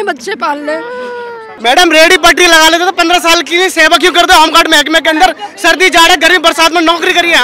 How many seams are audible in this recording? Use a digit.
1